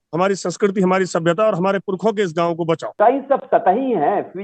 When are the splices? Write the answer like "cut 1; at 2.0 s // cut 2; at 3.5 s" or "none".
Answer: cut 1; at 3.0 s